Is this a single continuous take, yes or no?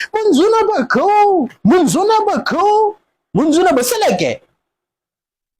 yes